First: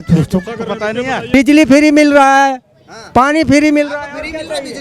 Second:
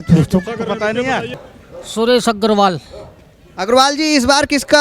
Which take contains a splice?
first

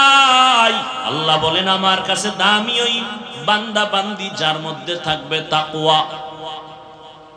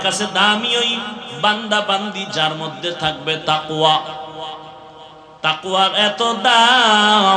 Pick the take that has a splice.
first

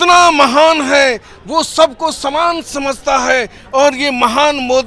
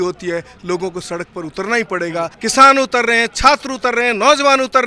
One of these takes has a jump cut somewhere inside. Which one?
second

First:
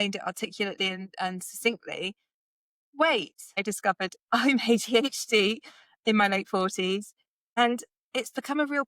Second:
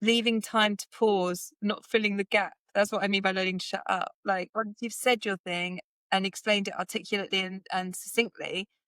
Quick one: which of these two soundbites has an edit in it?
first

